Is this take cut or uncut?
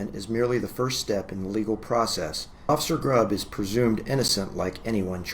cut